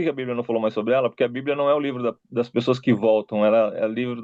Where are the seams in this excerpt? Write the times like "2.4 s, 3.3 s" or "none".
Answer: none

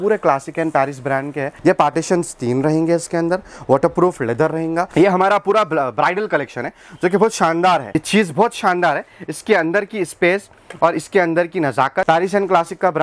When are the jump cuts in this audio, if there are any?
1.5 s, 4.9 s, 7.9 s, 12.0 s

